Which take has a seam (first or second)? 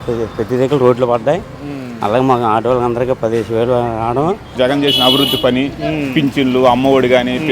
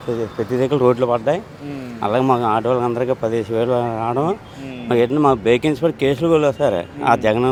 first